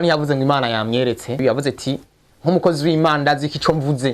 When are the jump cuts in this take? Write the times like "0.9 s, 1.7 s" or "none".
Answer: 1.4 s